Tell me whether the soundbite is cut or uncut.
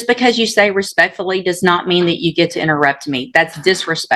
uncut